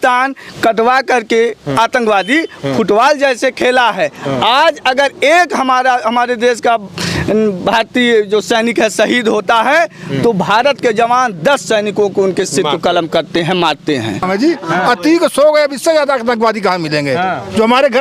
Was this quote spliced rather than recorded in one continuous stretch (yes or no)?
yes